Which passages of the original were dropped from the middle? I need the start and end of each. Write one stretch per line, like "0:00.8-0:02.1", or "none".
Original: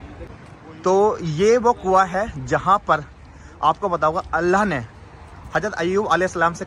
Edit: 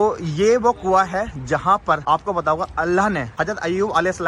0:03.0-0:03.6
0:04.8-0:05.4